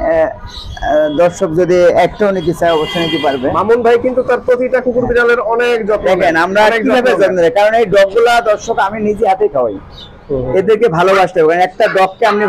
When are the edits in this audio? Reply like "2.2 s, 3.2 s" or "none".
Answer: none